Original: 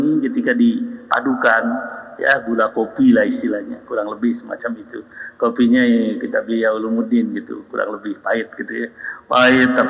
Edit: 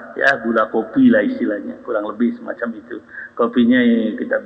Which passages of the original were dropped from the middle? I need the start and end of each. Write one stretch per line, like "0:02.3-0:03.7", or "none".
none